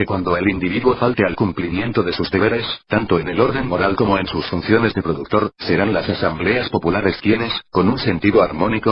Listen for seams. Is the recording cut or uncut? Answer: cut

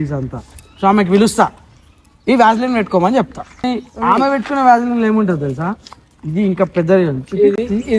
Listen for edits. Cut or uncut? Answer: cut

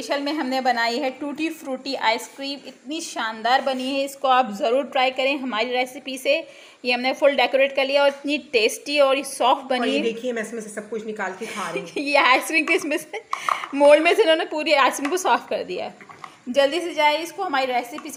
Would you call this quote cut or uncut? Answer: uncut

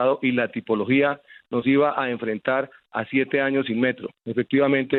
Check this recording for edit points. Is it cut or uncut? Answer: uncut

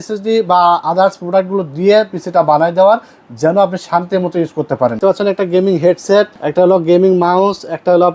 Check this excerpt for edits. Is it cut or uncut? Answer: cut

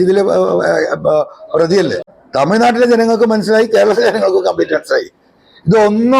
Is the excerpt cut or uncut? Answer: cut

